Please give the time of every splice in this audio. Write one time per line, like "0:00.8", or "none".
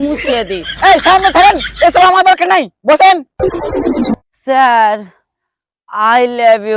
0:04.2